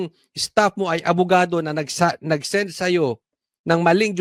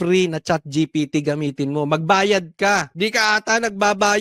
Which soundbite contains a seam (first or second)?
second